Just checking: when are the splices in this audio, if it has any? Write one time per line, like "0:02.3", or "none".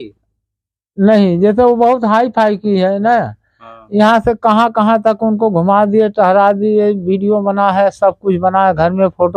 none